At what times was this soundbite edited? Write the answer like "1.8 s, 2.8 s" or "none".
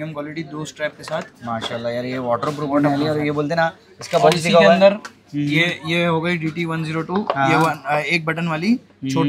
none